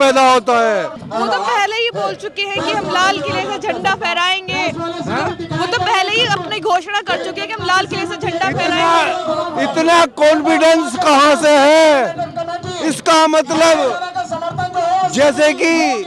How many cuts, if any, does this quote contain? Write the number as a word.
zero